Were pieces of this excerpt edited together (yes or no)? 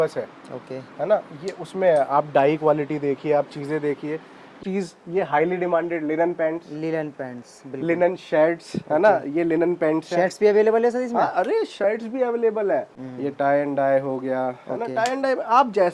yes